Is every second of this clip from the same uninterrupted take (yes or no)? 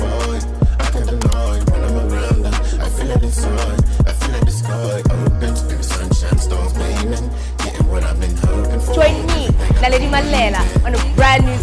yes